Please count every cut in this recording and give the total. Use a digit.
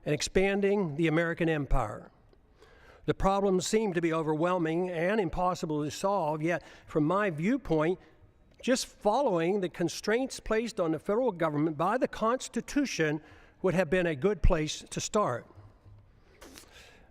1